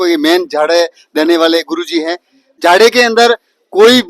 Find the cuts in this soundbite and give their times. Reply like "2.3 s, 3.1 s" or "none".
2.5 s